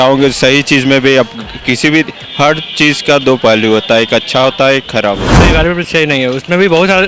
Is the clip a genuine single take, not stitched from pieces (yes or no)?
no